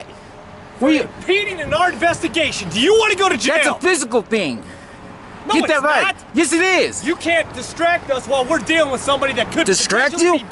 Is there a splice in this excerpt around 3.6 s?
no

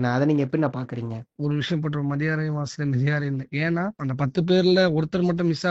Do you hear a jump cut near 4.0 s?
yes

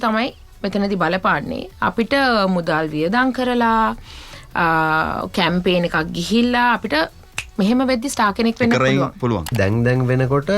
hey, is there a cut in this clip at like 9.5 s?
yes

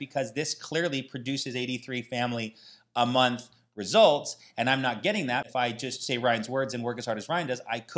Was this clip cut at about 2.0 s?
no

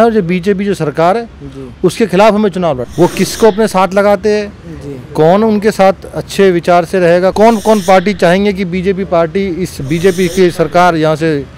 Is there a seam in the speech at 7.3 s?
yes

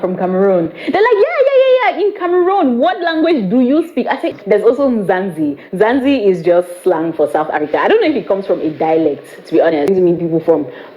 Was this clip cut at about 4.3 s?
yes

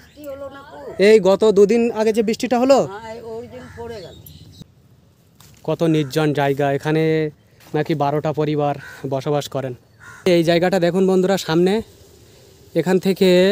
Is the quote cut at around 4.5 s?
yes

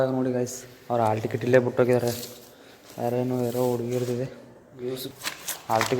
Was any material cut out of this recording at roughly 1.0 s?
no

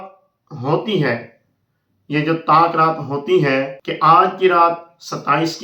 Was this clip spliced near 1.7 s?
no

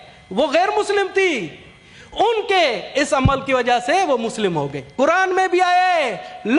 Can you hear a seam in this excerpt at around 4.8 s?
yes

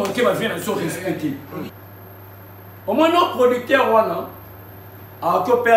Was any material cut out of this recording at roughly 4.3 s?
no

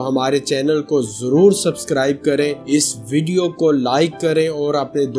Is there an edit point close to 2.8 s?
no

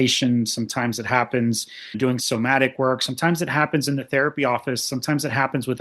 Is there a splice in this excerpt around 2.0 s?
yes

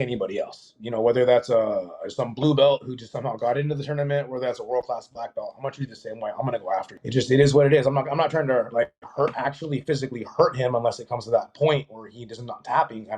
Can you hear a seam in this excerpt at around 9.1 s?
no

